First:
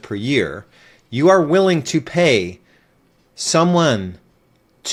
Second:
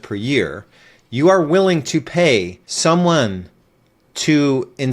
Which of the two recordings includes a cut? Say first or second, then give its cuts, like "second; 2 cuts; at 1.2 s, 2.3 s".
second; 1 cut; at 2.6 s